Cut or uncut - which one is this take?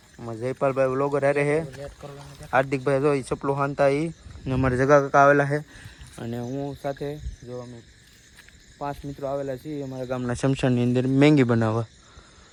uncut